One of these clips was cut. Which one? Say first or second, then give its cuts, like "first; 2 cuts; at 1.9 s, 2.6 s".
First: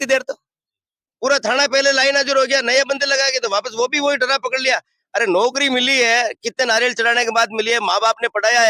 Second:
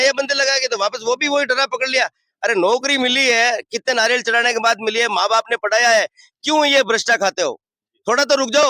first; 1 cut; at 1.1 s